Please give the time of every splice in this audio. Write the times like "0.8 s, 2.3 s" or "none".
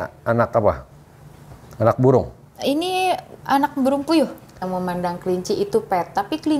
4.6 s